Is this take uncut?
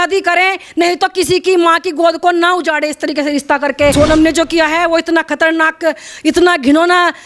no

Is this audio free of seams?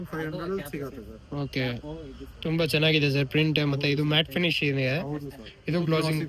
yes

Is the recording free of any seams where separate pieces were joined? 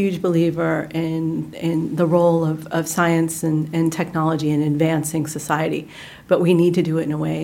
yes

